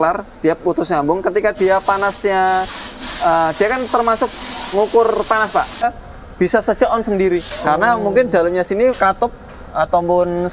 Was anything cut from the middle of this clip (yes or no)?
yes